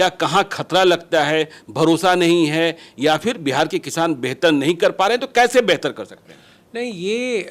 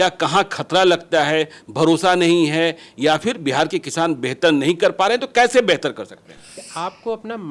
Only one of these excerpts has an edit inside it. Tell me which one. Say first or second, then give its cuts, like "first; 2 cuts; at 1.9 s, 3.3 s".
second; 1 cut; at 6.6 s